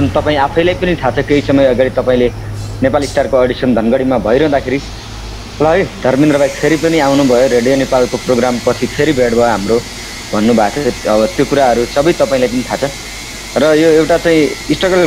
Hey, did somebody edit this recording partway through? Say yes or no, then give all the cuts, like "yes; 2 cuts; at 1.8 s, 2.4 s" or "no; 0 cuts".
no; 0 cuts